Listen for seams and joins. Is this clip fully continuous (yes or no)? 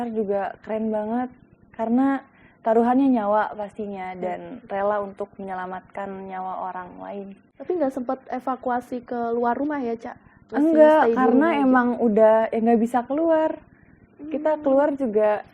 no